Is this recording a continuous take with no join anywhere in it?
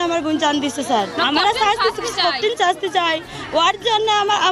no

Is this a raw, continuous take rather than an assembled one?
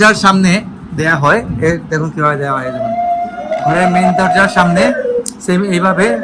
yes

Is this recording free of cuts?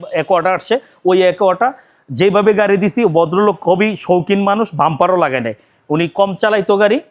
yes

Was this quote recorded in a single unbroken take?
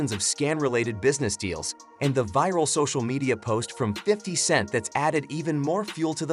yes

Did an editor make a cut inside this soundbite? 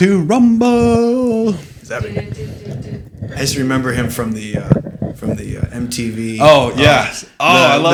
no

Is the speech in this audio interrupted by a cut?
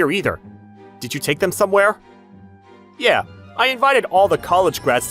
no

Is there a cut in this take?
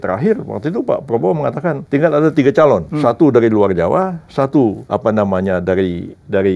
yes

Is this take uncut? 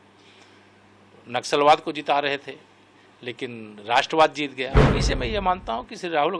no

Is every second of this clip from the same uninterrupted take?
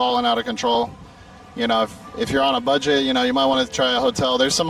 yes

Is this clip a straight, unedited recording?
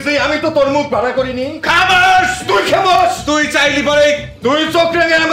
yes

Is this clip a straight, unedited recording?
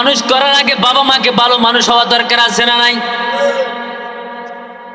yes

